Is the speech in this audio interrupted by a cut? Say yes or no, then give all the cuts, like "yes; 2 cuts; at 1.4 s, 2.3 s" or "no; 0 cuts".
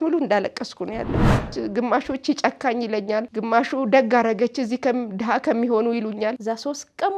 yes; 3 cuts; at 1.5 s, 3.3 s, 6.4 s